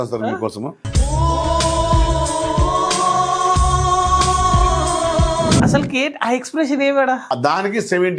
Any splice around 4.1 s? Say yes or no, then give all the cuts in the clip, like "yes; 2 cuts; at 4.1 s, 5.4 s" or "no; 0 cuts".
no; 2 cuts; at 5.6 s, 7.2 s